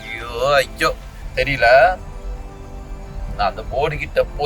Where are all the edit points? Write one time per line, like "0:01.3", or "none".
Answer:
0:02.8